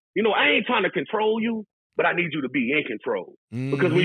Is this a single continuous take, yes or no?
yes